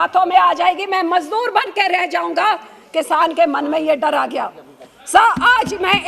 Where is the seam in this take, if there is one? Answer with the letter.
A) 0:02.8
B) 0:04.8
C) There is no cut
C